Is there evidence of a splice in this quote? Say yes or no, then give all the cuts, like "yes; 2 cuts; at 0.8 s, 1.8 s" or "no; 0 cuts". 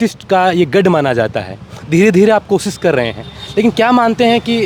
no; 0 cuts